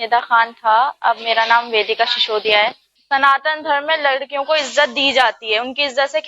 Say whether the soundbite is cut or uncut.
cut